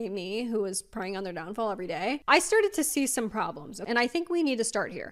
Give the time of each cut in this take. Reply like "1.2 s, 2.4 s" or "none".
2.2 s, 3.7 s

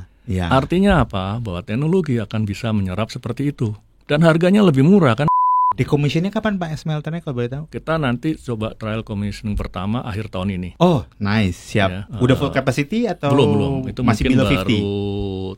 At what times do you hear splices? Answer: 5.3 s, 7.7 s, 10.7 s, 12.0 s

